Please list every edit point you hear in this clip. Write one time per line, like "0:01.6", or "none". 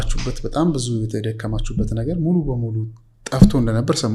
none